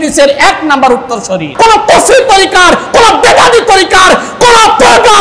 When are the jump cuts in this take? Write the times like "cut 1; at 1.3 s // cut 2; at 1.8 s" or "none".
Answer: cut 1; at 1.5 s